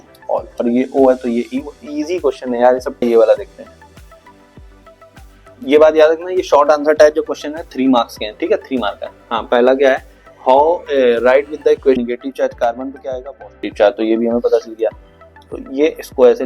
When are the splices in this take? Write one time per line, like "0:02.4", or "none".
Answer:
0:03.0
0:12.0